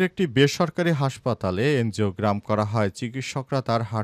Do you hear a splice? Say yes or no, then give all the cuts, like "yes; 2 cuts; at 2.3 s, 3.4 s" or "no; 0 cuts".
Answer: no; 0 cuts